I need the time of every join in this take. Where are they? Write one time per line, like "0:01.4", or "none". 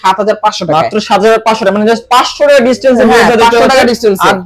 none